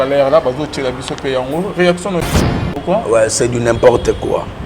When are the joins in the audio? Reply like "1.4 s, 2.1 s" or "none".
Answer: 2.3 s